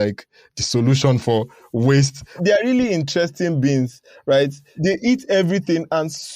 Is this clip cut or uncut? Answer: cut